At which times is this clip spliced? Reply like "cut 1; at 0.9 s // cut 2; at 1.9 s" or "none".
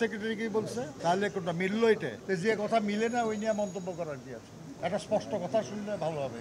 cut 1; at 0.9 s // cut 2; at 2.1 s // cut 3; at 4.6 s